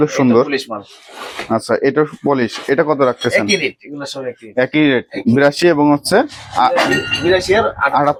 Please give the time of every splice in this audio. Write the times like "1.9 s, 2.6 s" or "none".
none